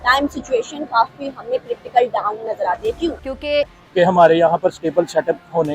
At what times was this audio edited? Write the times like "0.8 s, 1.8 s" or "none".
3.4 s